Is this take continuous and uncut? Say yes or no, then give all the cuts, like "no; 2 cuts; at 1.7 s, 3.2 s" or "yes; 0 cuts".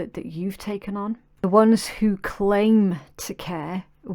no; 1 cut; at 1.4 s